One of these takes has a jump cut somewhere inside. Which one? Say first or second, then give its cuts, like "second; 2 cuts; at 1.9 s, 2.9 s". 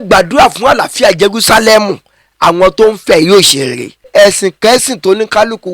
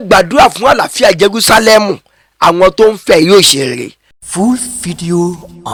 first; 1 cut; at 4.1 s